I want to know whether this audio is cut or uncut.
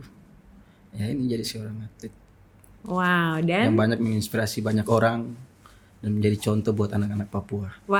uncut